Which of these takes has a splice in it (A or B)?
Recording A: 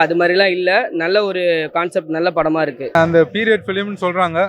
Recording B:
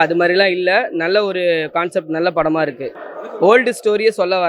A